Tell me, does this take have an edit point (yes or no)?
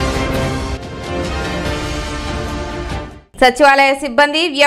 yes